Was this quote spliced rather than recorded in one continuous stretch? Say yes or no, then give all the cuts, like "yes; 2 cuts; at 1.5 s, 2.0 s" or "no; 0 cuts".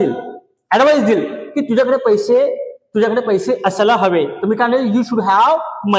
no; 0 cuts